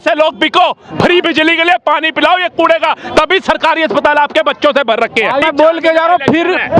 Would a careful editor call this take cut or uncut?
cut